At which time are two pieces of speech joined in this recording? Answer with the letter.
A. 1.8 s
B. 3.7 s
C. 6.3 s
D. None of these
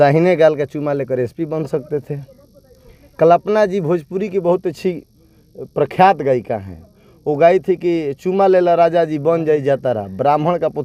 D